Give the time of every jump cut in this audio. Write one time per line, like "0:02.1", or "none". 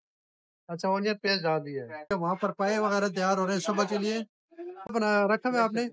0:02.1
0:04.9